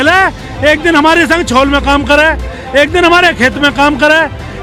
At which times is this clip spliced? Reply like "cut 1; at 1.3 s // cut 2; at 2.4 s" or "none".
none